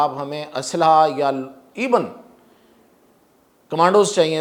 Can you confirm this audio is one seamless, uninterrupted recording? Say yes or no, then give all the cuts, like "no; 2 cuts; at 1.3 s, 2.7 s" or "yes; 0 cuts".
yes; 0 cuts